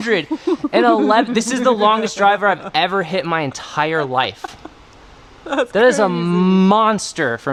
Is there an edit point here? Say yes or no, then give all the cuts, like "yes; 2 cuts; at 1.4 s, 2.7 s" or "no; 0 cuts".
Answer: no; 0 cuts